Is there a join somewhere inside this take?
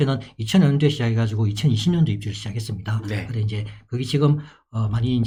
no; 0 cuts

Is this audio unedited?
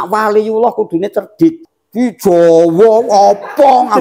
no; 1 cut; at 1.7 s

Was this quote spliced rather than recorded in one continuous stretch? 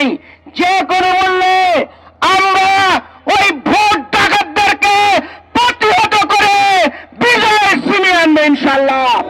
no; 0 cuts

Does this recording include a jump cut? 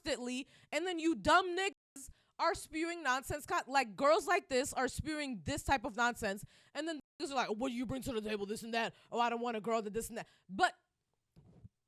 no; 0 cuts

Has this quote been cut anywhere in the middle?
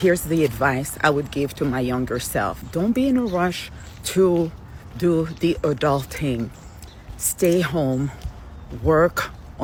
no; 0 cuts

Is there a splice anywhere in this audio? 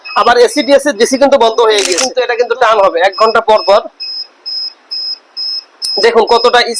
yes; 1 cut; at 2.1 s

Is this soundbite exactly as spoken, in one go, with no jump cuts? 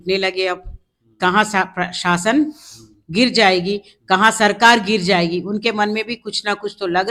yes; 0 cuts

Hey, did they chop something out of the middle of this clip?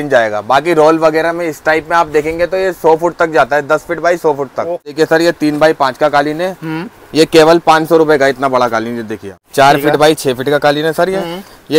yes; 2 cuts; at 4.9 s, 9.4 s

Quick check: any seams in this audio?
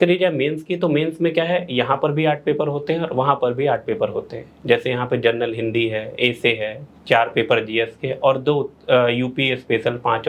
no; 0 cuts

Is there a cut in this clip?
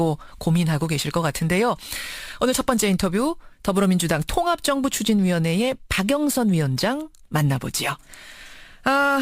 yes; 1 cut; at 3.3 s

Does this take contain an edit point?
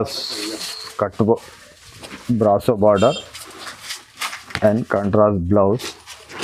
no; 0 cuts

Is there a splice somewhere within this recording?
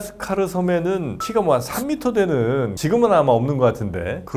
no; 0 cuts

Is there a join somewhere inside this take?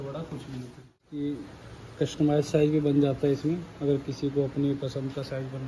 yes; 1 cut; at 1.0 s

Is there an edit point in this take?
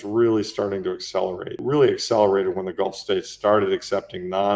yes; 1 cut; at 1.6 s

